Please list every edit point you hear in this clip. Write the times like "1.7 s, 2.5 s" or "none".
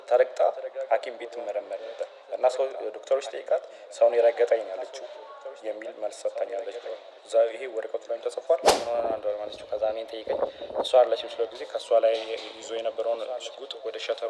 8.7 s